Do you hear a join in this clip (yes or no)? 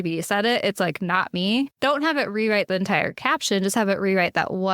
yes